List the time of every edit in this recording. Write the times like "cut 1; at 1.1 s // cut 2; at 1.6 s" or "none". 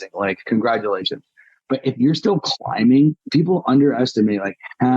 cut 1; at 3.2 s